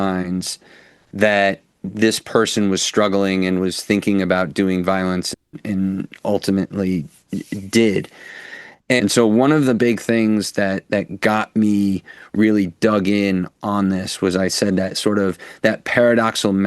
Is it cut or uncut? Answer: cut